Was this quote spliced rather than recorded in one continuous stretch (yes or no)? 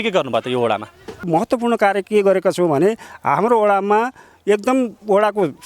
yes